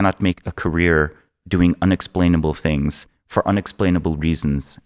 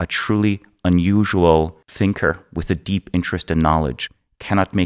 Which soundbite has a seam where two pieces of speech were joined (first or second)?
second